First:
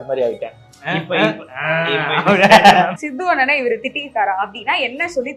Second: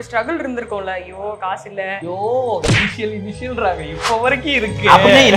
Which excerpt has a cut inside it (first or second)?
first